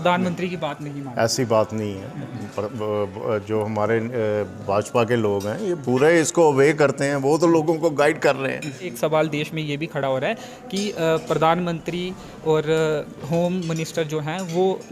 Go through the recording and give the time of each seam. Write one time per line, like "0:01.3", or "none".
0:08.9